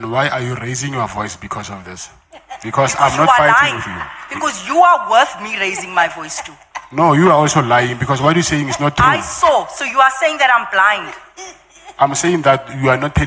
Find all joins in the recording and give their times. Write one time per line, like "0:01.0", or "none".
none